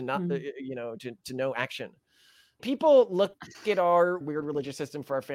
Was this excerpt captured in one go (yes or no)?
no